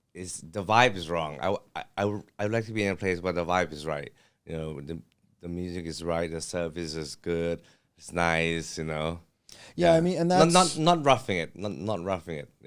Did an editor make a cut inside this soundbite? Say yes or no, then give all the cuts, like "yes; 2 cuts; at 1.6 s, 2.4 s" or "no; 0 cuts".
no; 0 cuts